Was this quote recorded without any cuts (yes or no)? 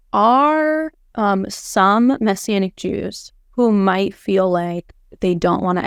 yes